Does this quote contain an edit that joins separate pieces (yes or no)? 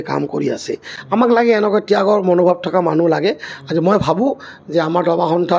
no